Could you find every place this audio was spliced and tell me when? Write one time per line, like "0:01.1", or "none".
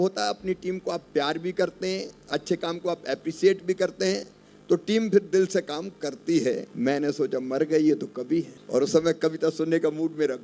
0:06.7
0:08.6